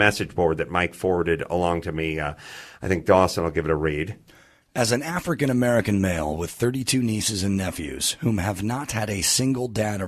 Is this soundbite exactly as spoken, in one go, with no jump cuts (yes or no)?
yes